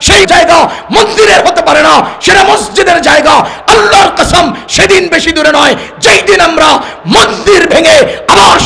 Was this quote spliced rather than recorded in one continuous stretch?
no; 0 cuts

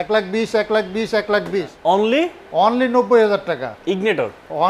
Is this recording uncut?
no; 1 cut; at 1.7 s

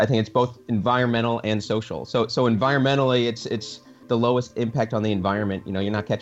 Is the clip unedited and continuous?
no; 1 cut; at 4.0 s

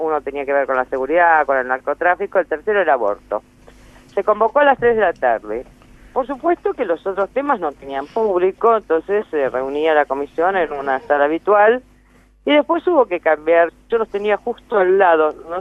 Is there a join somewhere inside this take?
no; 0 cuts

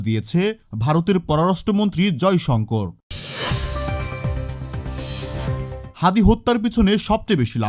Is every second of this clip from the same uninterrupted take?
yes; 0 cuts

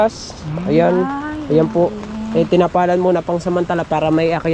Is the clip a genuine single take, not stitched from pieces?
yes; 0 cuts

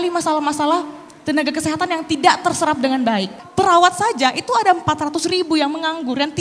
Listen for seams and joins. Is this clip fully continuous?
no; 1 cut; at 3.4 s

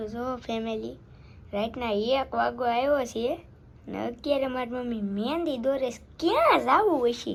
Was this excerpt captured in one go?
yes; 0 cuts

